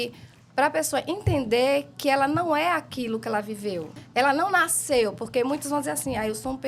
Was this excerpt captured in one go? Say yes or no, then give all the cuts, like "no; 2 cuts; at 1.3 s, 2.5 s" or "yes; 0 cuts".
no; 1 cut; at 4.0 s